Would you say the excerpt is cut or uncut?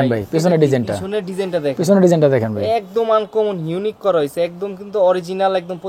uncut